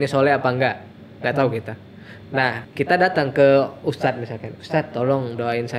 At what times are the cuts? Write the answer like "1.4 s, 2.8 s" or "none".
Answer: 2.6 s